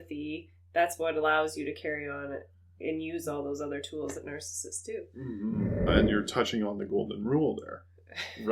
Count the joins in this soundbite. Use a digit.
1